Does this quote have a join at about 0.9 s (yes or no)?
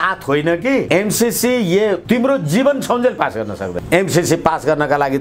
yes